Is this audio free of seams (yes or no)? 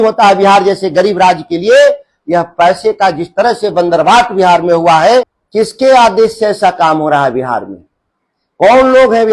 no